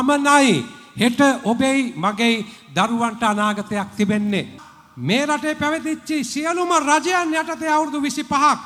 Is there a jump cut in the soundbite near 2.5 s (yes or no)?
no